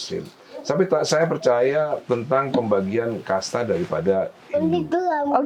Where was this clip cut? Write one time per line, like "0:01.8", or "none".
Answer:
none